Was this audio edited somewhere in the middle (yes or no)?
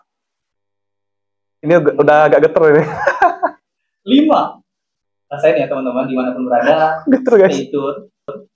no